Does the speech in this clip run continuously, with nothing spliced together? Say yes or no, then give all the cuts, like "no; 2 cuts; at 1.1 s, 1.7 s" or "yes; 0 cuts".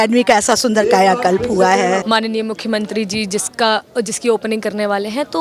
no; 1 cut; at 2.0 s